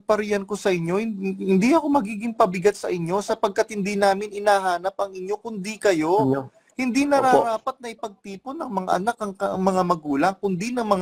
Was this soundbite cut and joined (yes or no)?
no